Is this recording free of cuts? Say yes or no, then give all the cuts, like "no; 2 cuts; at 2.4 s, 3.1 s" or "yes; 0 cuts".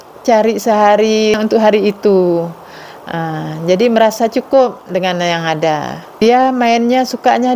no; 2 cuts; at 1.4 s, 6.2 s